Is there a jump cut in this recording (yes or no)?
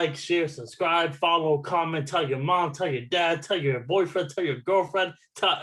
no